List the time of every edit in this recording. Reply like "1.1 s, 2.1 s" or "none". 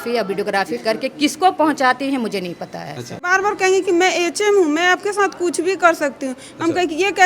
3.3 s